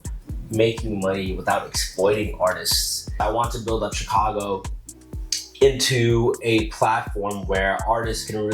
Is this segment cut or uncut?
cut